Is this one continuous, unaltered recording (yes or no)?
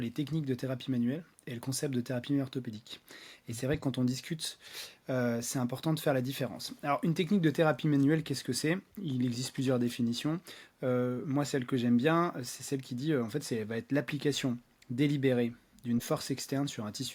yes